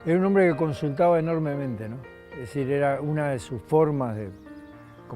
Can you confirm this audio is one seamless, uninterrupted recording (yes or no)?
yes